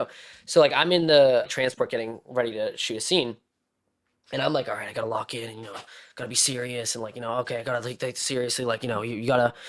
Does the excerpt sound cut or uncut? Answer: cut